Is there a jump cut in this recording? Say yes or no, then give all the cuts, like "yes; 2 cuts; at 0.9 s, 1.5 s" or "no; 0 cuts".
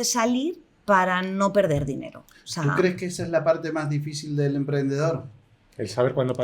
no; 0 cuts